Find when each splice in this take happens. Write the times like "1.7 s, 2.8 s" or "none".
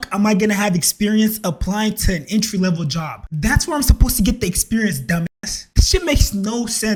none